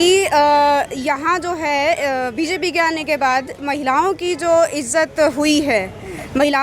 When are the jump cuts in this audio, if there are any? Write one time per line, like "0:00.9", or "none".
none